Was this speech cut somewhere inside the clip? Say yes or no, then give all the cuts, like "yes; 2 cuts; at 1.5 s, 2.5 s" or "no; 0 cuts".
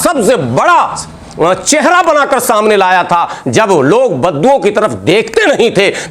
no; 0 cuts